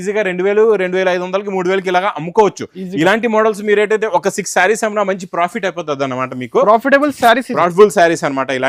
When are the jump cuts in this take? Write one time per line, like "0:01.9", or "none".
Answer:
none

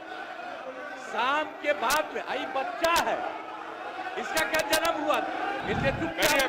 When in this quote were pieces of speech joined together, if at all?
0:05.6

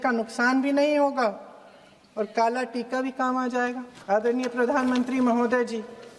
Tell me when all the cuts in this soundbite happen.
0:03.9

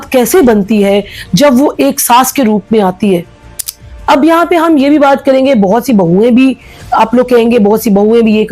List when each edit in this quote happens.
none

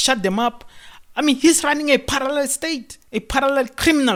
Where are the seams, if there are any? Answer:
none

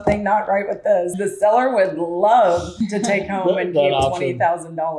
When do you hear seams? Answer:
0:01.1
0:02.8

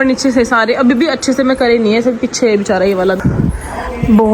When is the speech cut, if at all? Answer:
0:03.2

